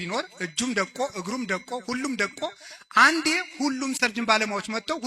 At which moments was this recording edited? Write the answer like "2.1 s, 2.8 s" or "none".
4.0 s